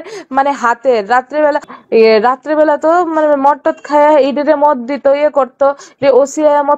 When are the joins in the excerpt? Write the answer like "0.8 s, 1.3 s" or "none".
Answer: 1.7 s